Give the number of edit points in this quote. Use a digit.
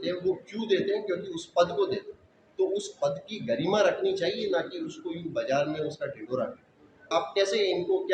1